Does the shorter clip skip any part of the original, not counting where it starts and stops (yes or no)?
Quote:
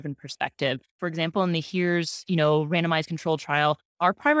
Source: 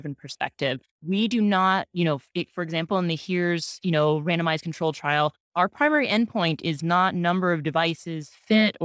yes